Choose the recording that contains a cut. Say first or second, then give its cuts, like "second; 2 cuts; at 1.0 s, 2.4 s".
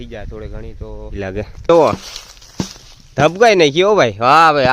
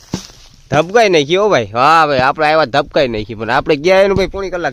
first; 1 cut; at 1.2 s